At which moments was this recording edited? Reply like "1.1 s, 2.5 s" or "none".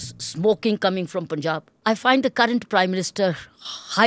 1.7 s

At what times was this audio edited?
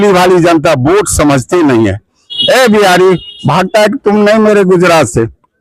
2.3 s

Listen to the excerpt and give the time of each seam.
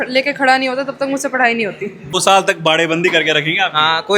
2.1 s

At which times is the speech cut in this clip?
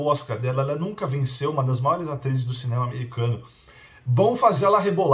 none

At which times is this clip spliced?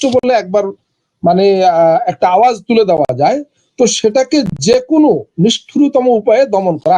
none

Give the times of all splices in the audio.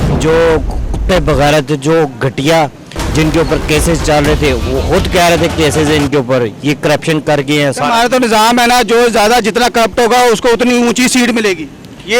none

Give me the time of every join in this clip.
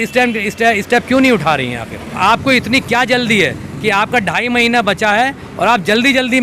2.2 s

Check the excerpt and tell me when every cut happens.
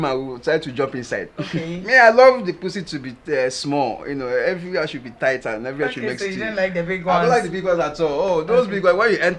none

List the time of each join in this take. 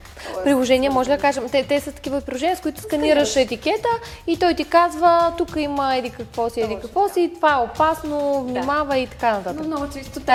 none

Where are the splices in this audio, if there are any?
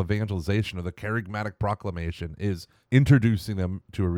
2.7 s

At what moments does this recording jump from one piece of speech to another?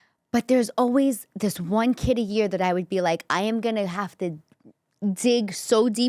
none

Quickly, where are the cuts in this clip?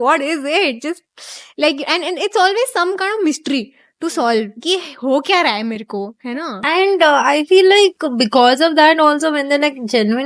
none

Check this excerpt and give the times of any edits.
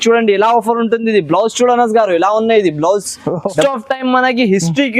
3.6 s

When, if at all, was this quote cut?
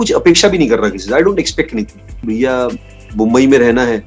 2.2 s

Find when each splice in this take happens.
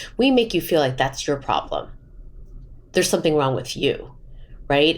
none

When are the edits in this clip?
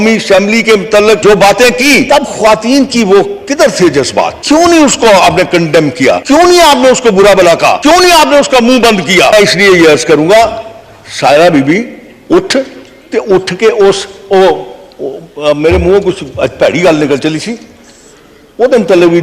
1.2 s, 2.1 s, 4.4 s, 6.2 s, 7.8 s, 9.3 s

